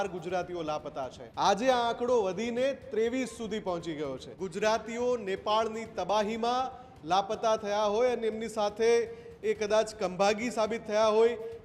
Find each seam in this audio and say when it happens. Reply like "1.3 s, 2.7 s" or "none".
1.2 s, 4.3 s